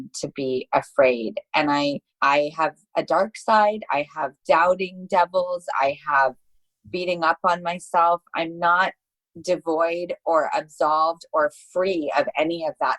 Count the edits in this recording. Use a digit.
1